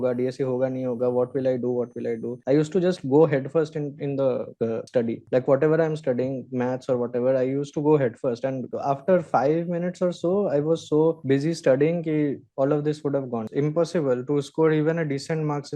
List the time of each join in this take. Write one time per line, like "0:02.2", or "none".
0:13.4